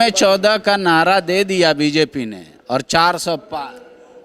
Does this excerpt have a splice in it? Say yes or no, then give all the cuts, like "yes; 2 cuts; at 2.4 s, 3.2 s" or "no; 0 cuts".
no; 0 cuts